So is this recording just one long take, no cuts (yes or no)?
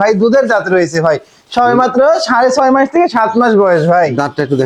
yes